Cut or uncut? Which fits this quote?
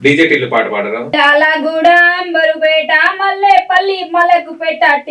cut